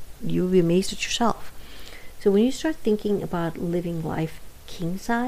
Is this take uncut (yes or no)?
yes